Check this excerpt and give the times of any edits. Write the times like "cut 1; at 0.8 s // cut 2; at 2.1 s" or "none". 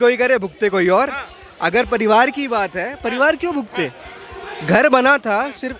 none